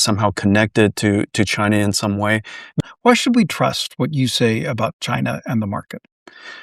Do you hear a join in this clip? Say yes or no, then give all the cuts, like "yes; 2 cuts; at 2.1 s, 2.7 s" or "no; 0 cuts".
yes; 1 cut; at 2.8 s